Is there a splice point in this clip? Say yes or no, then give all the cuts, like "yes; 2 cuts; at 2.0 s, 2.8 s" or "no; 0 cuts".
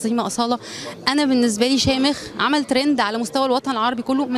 no; 0 cuts